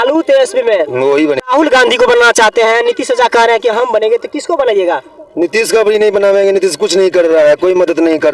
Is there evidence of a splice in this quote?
yes; 1 cut; at 1.4 s

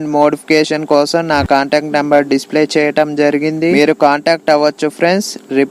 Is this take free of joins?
no; 1 cut; at 3.9 s

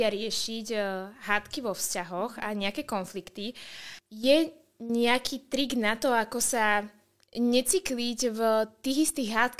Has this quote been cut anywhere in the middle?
no; 0 cuts

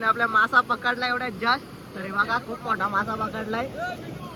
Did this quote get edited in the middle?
no; 0 cuts

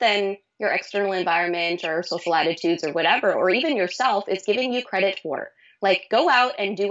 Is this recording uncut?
yes; 0 cuts

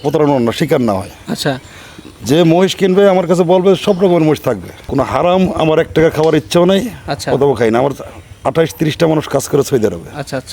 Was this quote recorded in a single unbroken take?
no; 1 cut; at 4.7 s

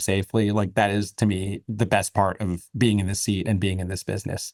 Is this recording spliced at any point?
no; 0 cuts

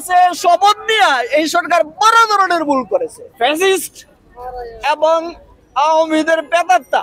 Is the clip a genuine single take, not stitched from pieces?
no; 1 cut; at 3.2 s

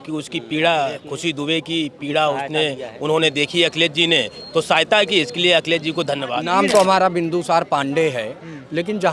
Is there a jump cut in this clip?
yes; 1 cut; at 6.4 s

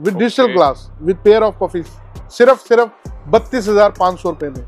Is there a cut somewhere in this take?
no; 0 cuts

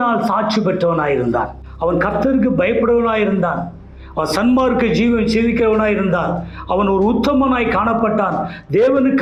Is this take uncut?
yes; 0 cuts

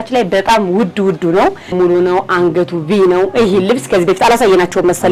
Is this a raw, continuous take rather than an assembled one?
no; 1 cut; at 1.7 s

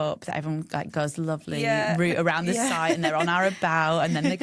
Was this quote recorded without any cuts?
yes; 0 cuts

